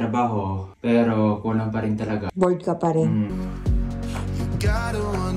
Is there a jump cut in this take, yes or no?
yes